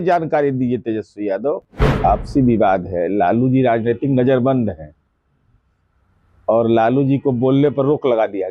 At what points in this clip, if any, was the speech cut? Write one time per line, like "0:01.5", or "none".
0:01.7